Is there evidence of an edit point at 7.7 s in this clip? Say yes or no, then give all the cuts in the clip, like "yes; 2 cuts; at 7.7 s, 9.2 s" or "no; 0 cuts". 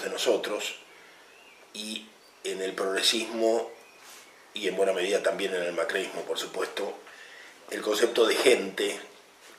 no; 1 cut; at 2.4 s